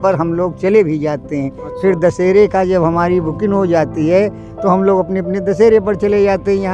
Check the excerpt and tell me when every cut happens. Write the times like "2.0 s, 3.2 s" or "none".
none